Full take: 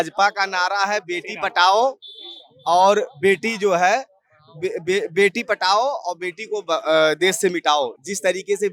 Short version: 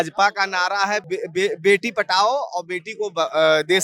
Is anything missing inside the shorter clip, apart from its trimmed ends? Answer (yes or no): yes